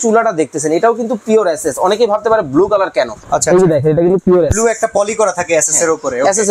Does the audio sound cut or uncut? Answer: uncut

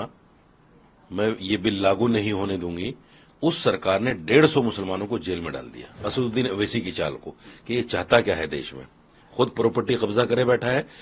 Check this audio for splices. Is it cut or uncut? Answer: cut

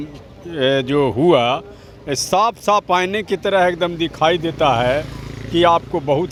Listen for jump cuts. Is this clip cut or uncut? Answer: uncut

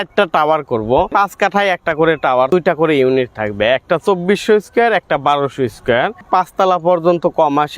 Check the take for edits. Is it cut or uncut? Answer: cut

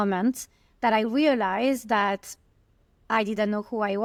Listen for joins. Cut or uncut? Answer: uncut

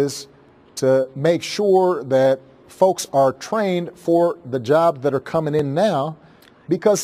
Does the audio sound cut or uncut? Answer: cut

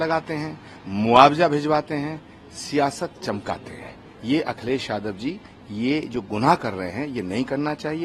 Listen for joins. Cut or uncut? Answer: uncut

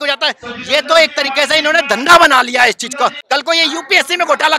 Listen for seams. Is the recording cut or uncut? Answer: cut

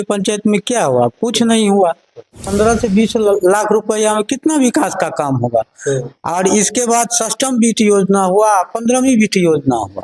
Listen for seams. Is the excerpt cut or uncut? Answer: cut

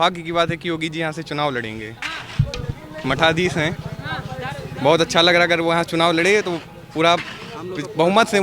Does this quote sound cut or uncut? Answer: uncut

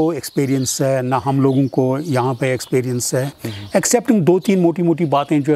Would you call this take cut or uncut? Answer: cut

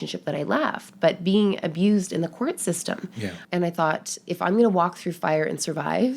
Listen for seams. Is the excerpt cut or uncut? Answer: cut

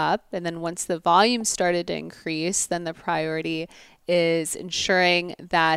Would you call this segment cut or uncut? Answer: uncut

